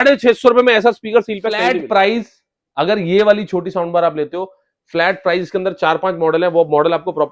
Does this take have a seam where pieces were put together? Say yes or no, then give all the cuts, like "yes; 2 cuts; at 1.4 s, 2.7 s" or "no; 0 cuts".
yes; 1 cut; at 1.7 s